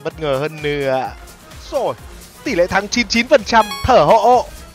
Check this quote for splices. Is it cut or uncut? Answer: cut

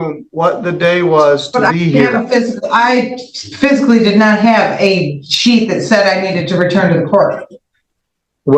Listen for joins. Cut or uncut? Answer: uncut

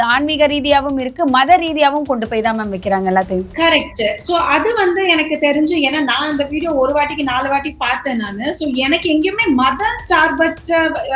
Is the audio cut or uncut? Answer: uncut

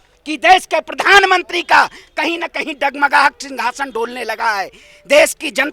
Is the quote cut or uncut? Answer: uncut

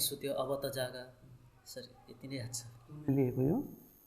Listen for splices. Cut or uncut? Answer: uncut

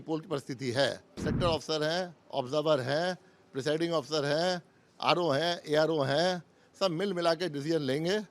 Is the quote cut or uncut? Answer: cut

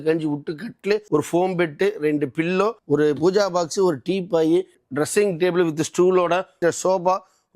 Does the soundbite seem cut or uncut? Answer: cut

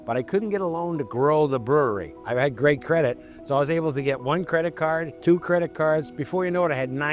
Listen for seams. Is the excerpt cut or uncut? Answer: cut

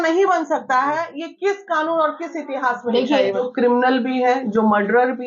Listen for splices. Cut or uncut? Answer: cut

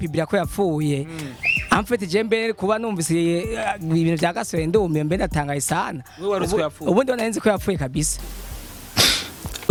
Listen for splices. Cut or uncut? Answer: uncut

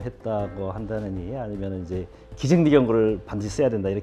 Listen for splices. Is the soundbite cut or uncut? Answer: uncut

